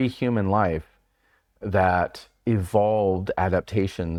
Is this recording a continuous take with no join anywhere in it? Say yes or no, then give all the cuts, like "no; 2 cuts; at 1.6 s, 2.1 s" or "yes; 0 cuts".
yes; 0 cuts